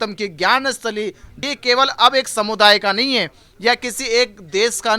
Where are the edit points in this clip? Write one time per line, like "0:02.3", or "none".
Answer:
0:01.3